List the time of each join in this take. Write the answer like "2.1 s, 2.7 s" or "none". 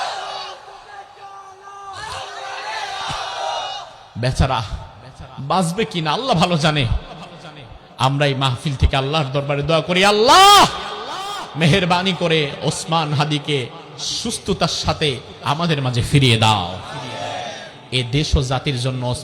4.0 s